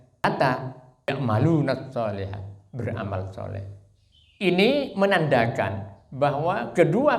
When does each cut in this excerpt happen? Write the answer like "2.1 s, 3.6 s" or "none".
1.1 s